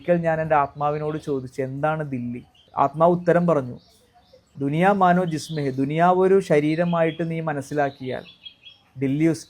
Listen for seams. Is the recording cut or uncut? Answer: cut